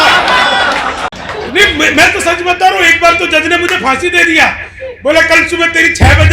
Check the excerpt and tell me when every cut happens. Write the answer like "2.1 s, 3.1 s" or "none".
1.1 s

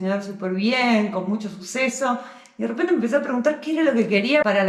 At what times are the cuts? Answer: none

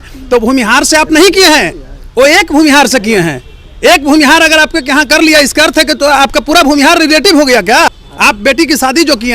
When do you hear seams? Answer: 8.0 s

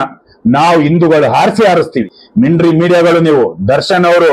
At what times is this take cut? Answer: 2.1 s

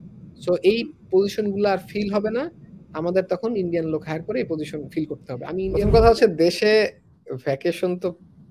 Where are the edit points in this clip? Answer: 5.2 s

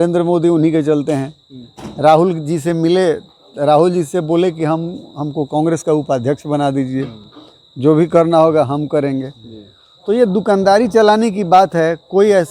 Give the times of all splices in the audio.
none

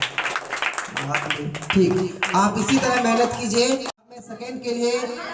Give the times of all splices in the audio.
4.1 s

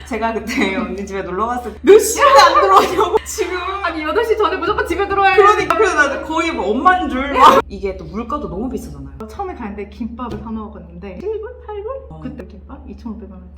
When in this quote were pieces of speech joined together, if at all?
7.7 s, 9.1 s, 11.1 s

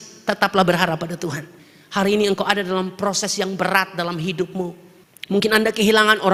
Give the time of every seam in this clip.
none

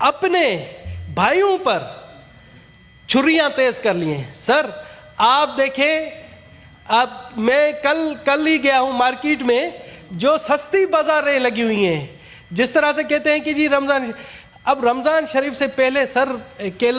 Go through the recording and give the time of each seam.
none

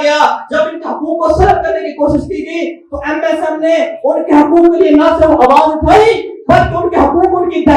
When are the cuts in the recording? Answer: none

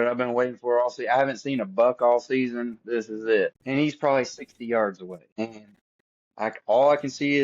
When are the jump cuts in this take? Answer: 3.6 s, 5.3 s

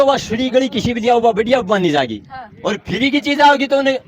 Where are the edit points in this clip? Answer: none

